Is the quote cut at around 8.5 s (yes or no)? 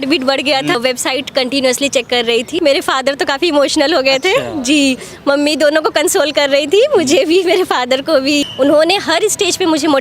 yes